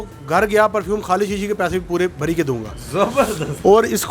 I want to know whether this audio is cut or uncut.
uncut